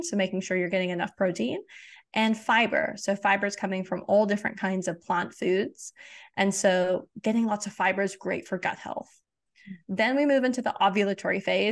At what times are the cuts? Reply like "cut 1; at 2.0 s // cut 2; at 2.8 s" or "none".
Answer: none